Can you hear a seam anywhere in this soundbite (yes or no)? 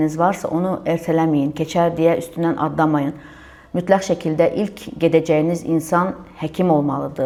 no